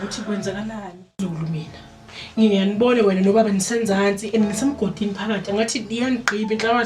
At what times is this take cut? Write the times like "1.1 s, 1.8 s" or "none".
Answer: 1.2 s